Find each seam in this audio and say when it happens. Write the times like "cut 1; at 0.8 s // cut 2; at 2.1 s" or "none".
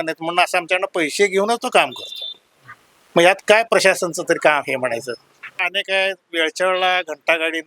cut 1; at 5.5 s